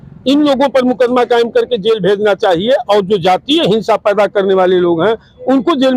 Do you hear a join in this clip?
no; 0 cuts

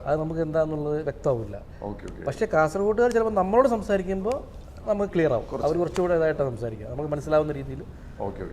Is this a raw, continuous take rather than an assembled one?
yes; 0 cuts

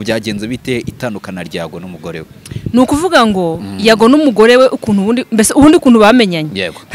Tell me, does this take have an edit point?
no; 0 cuts

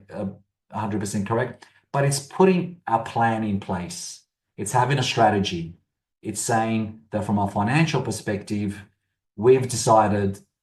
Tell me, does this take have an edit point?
no; 0 cuts

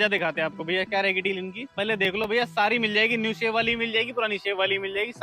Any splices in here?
yes; 1 cut; at 1.7 s

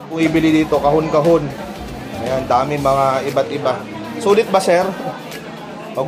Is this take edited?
no; 0 cuts

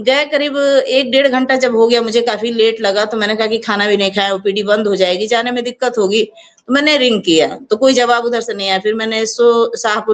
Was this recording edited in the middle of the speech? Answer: no; 0 cuts

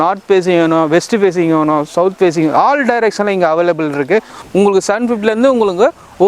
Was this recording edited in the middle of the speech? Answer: yes; 1 cut; at 4.4 s

